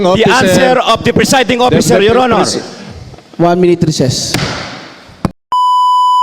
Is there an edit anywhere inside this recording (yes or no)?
yes